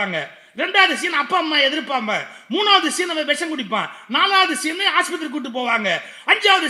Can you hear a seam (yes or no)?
no